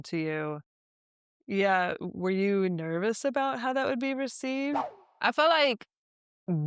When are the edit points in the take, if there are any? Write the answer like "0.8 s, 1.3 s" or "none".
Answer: none